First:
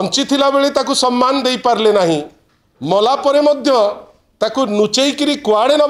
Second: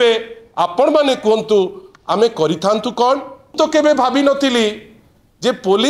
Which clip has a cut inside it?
second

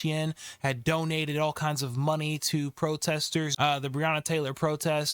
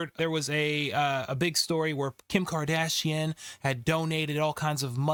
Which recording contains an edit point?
first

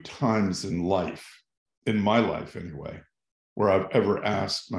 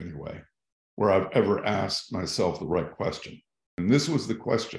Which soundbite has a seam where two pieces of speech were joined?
second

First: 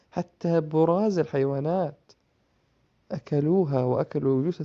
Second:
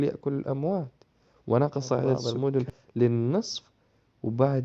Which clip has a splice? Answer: second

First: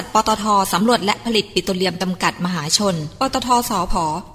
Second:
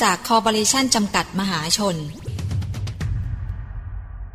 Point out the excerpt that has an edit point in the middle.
second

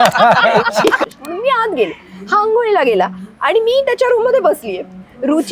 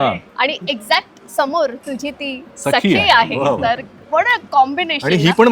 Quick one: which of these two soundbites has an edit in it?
first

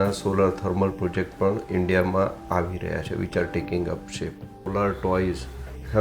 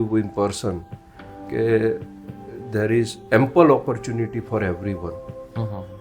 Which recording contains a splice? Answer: first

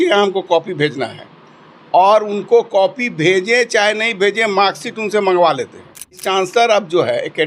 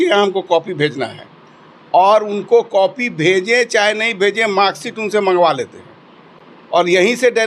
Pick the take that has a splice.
first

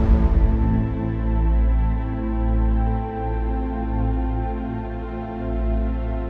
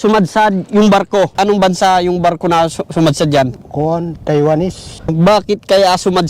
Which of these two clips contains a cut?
second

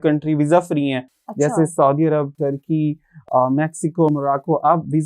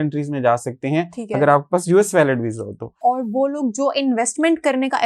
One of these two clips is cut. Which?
second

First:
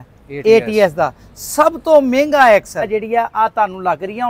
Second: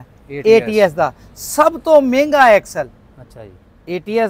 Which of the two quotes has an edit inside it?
first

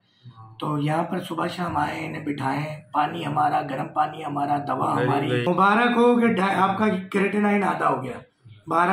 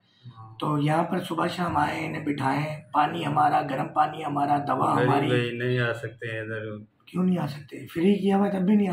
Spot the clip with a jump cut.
first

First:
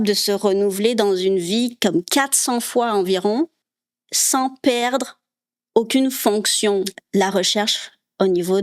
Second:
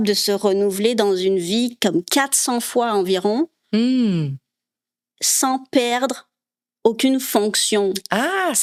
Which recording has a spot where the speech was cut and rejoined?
first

